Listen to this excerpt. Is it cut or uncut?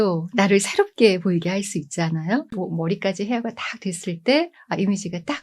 cut